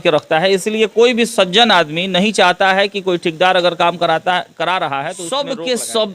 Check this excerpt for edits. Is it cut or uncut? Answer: cut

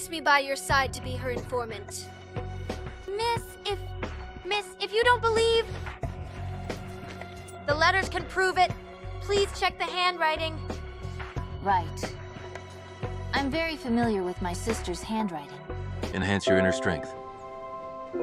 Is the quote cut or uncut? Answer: cut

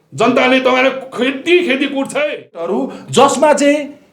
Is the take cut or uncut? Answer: cut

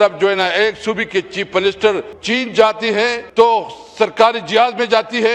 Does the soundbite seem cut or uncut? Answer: cut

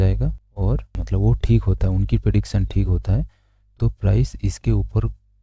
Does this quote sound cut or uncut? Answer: cut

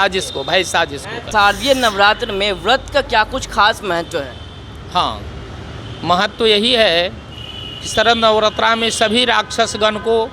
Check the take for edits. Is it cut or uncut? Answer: cut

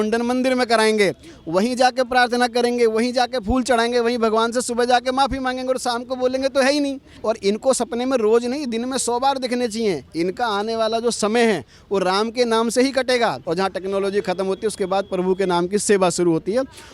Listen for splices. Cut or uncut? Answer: cut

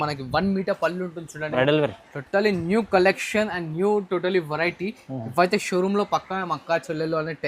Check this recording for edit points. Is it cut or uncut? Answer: cut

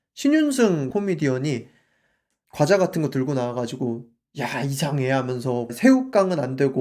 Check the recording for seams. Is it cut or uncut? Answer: uncut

